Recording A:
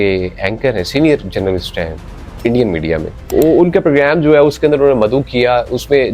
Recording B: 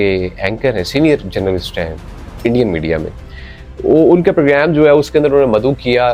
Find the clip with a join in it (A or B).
A